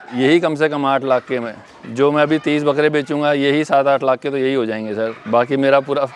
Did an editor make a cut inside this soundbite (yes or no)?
no